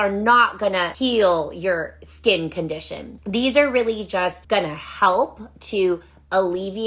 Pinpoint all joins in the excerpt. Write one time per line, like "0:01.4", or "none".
0:00.9
0:04.4